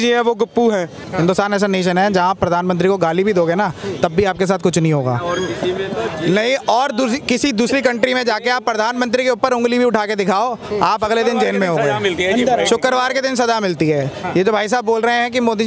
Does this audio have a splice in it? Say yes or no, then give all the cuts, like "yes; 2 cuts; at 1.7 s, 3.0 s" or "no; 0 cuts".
yes; 1 cut; at 1.0 s